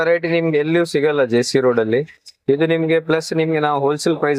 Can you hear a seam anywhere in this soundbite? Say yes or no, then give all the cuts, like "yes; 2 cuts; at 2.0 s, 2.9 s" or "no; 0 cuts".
no; 0 cuts